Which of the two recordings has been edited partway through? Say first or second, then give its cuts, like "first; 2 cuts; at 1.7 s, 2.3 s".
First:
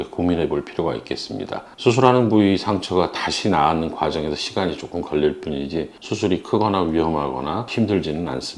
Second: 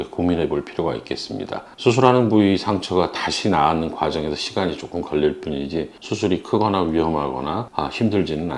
first; 1 cut; at 7.7 s